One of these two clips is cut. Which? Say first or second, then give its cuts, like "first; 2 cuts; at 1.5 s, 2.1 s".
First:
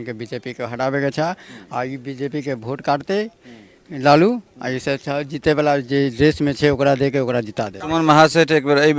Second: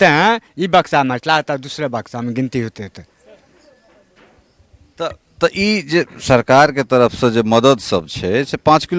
first; 1 cut; at 7.8 s